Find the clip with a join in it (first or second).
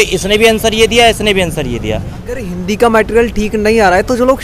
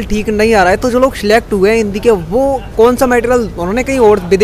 first